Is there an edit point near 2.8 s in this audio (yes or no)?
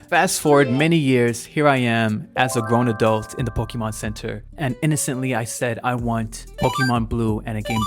no